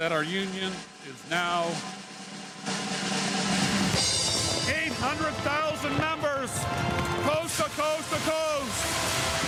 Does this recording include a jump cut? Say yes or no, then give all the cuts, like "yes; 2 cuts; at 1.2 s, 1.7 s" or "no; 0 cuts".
no; 0 cuts